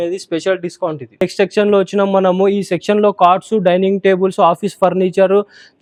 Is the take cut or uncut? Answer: uncut